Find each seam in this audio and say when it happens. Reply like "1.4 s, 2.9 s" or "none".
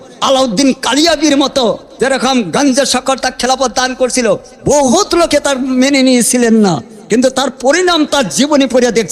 none

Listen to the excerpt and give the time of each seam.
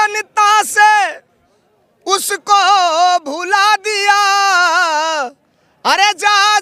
none

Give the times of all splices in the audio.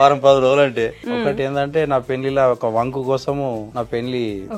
1.0 s, 3.7 s

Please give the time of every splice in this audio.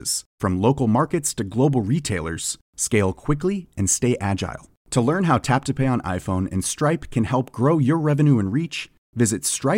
none

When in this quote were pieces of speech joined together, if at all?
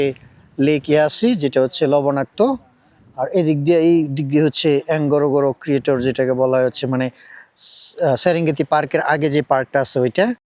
none

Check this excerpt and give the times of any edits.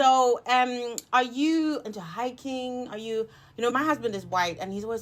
1.8 s, 3.7 s

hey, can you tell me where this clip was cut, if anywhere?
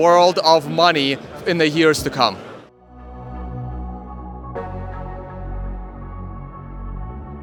none

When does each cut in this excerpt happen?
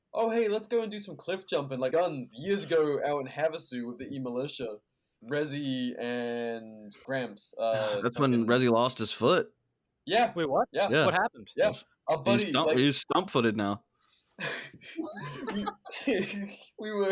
1.9 s, 5.1 s

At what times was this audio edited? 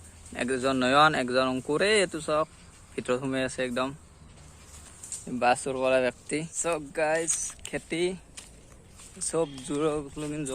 6.5 s

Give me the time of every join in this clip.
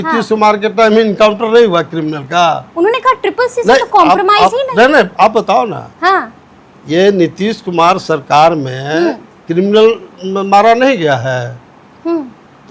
none

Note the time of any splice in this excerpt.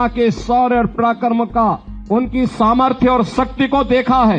1.9 s

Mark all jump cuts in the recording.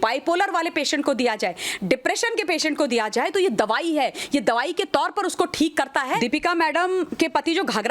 6.1 s

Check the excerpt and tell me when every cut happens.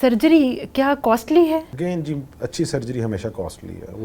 none

